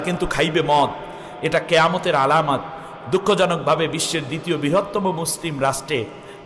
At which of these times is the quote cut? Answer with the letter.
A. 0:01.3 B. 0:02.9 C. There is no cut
C